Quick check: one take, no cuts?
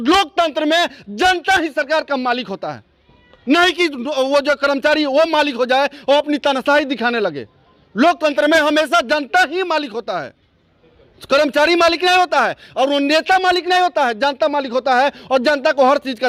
yes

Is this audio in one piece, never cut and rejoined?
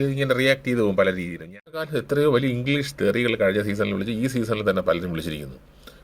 no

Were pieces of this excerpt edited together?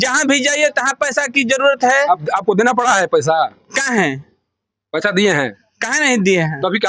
no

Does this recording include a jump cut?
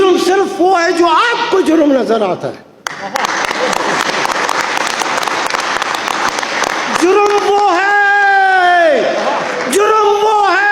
no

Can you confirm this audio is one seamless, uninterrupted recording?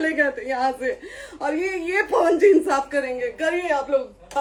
yes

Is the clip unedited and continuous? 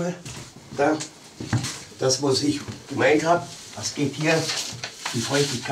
yes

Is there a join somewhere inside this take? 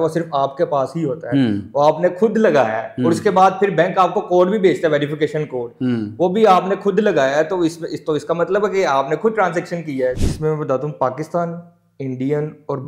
yes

